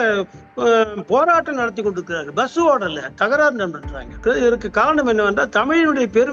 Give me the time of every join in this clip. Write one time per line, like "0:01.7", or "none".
0:04.2